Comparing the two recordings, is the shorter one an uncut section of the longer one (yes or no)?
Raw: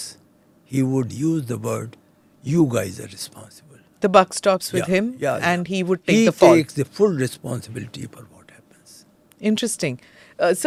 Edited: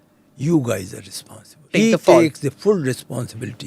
no